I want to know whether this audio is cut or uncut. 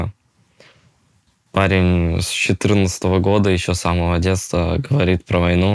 uncut